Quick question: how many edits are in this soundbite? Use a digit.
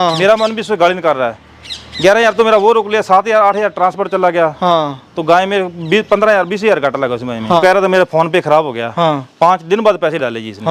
1